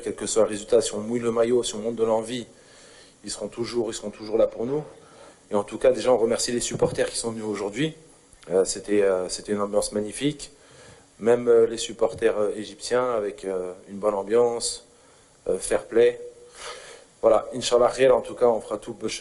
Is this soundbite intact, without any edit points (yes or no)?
yes